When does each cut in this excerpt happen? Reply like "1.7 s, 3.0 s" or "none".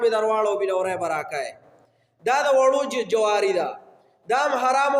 none